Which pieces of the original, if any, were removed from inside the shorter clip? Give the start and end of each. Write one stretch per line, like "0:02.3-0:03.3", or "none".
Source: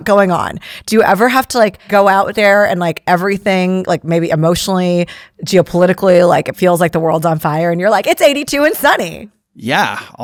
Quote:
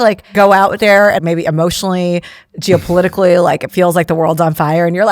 0:02.8-0:04.0